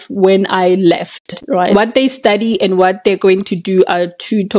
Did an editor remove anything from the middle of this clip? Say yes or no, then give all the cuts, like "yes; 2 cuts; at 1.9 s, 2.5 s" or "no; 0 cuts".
yes; 1 cut; at 1.7 s